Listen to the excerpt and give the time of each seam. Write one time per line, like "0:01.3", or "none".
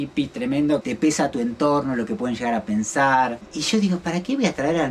0:00.8
0:03.4